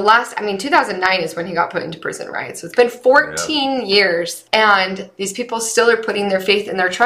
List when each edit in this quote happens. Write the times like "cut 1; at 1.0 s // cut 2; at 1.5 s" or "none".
cut 1; at 4.4 s